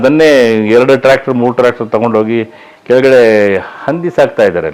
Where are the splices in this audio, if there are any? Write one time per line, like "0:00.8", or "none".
none